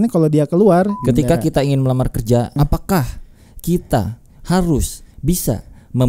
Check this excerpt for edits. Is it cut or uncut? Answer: cut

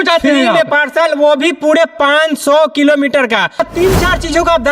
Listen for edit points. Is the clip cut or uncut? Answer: cut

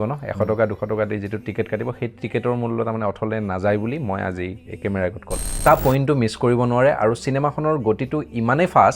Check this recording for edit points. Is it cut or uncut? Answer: cut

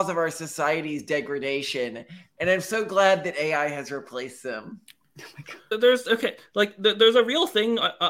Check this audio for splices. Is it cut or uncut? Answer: uncut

